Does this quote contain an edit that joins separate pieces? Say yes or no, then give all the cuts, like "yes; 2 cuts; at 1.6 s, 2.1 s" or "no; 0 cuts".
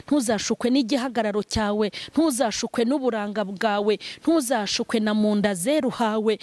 no; 0 cuts